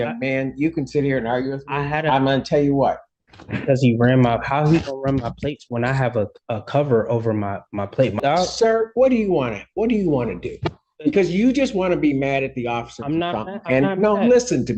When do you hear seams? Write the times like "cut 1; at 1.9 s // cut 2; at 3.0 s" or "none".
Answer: cut 1; at 3.1 s // cut 2; at 8.2 s